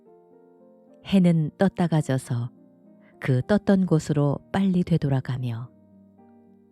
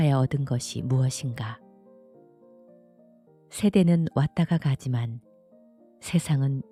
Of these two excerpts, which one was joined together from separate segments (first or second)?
first